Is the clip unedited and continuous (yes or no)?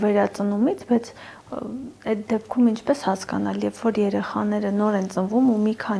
yes